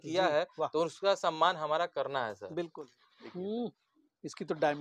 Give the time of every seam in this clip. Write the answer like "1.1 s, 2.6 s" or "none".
2.7 s